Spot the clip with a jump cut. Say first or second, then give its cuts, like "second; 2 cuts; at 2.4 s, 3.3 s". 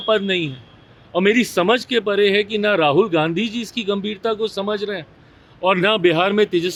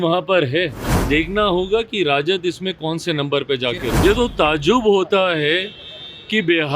second; 2 cuts; at 1.0 s, 4.0 s